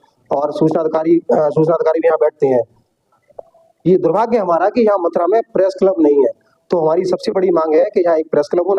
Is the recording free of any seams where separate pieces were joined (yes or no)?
yes